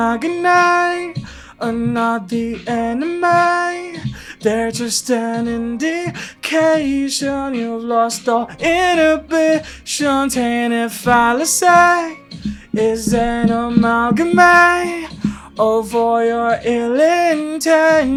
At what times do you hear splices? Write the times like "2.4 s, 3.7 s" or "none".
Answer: none